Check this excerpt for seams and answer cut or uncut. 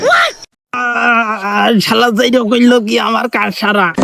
uncut